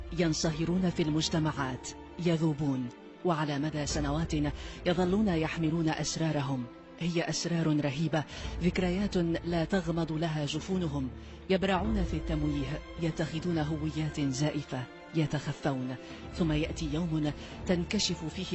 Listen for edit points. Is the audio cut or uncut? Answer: uncut